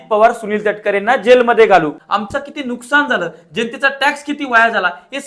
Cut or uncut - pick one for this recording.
cut